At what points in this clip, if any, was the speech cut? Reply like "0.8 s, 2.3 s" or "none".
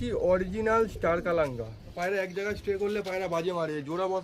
1.9 s